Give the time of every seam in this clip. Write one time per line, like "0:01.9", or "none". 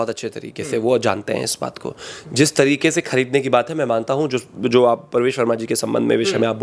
none